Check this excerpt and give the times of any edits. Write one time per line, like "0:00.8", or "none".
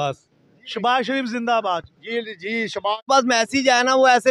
0:03.1